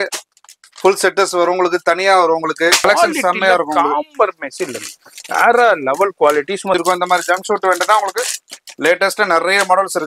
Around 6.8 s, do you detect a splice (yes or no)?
yes